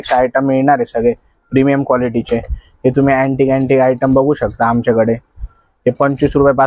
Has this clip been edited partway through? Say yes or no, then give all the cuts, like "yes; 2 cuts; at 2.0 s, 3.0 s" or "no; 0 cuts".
no; 0 cuts